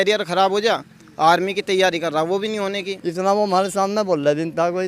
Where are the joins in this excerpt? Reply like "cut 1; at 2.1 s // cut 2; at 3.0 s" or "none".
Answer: cut 1; at 2.9 s